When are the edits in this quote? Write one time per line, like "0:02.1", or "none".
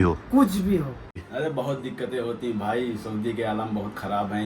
0:01.3